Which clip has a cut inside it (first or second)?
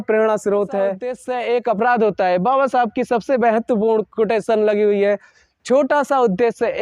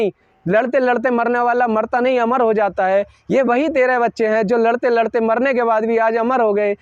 first